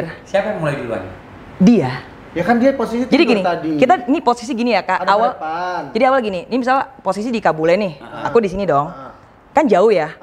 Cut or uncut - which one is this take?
uncut